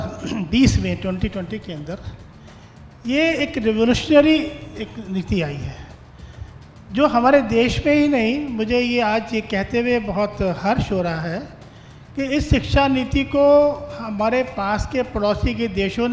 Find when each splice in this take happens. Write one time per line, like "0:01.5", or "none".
none

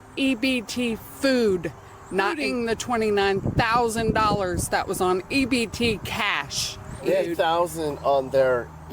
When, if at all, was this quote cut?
0:02.4
0:07.3

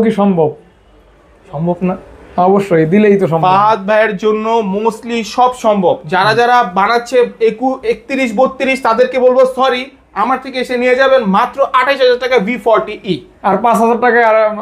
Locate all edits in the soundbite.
none

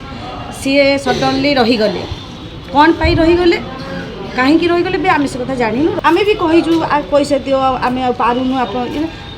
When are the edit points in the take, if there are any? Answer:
0:06.0

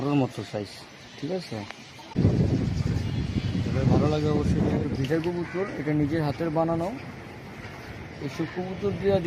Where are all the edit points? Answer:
0:02.1
0:04.8

